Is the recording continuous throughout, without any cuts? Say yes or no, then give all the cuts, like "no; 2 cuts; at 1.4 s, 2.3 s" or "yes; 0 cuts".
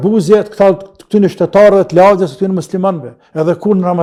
yes; 0 cuts